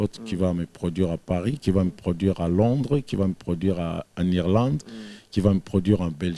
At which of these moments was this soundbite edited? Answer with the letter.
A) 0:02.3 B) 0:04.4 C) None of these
C